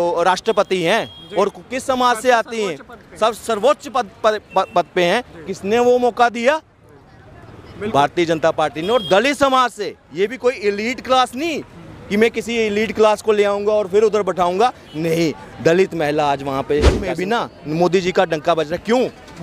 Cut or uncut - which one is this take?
cut